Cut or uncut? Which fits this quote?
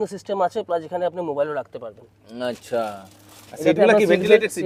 uncut